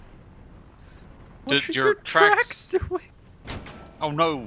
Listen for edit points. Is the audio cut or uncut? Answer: cut